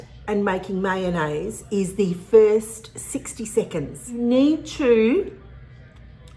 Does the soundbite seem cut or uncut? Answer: cut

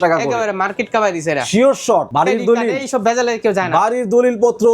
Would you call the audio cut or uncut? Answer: cut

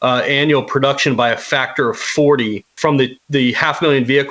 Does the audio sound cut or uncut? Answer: cut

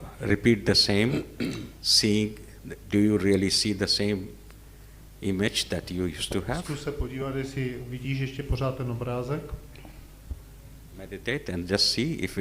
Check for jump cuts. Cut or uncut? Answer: uncut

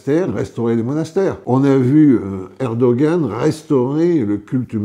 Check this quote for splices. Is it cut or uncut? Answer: cut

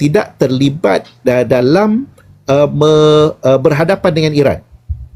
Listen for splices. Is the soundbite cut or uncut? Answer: uncut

